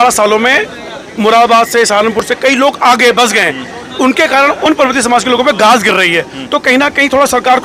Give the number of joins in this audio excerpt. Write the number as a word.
zero